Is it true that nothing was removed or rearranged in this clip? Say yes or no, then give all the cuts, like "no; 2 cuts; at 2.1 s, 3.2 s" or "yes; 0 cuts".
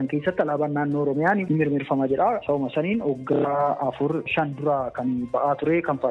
no; 2 cuts; at 1.4 s, 4.3 s